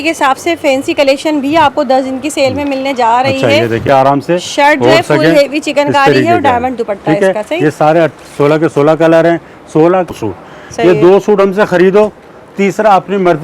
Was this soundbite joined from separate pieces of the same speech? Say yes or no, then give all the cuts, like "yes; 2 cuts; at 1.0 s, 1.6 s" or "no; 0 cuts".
yes; 2 cuts; at 3.8 s, 10.1 s